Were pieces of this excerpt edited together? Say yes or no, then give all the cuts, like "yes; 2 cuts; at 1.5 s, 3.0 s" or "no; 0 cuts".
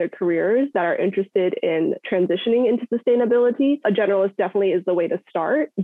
yes; 1 cut; at 3.8 s